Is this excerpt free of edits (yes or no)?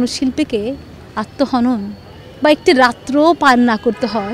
yes